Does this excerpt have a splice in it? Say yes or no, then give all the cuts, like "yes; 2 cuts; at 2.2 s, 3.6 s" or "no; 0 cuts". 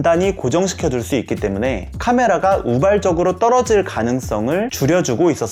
no; 0 cuts